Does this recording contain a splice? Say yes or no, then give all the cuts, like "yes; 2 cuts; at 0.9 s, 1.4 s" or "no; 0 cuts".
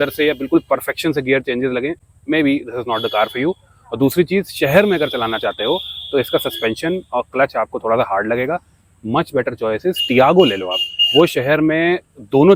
no; 0 cuts